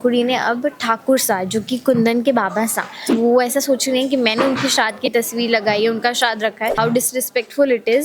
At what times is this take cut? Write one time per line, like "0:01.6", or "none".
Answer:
0:03.1
0:06.8